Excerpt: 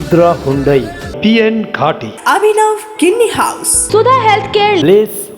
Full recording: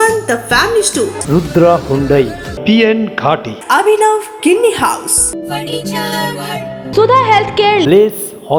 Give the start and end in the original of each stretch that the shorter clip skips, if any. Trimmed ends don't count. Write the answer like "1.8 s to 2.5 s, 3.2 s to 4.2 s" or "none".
5.1 s to 6.7 s

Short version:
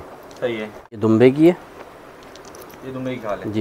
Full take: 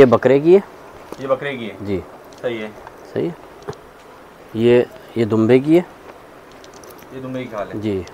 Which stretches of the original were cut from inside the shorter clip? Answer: 3.0 s to 5.3 s

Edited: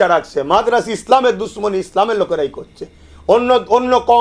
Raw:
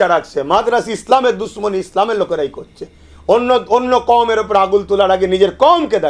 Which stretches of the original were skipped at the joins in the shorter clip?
none

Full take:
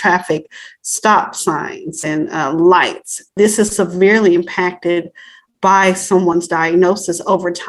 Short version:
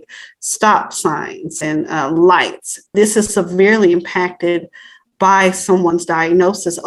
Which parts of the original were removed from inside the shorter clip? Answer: none

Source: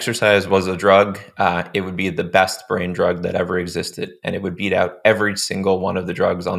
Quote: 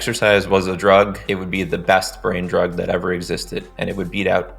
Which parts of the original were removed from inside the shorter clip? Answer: 1.2 s to 1.7 s

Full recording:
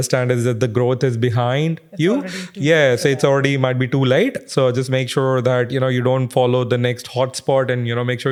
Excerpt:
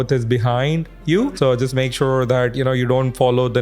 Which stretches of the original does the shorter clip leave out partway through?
2.2 s to 4.5 s

